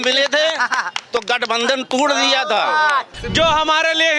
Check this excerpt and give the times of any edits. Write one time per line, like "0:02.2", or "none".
0:03.1